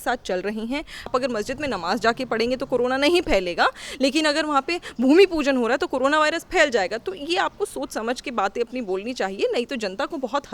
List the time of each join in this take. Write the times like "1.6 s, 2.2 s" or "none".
1.1 s